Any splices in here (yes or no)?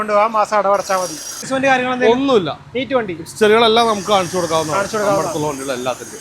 yes